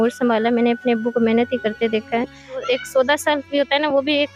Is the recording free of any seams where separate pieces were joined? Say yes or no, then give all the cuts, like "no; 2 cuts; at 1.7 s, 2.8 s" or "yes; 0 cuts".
no; 1 cut; at 2.6 s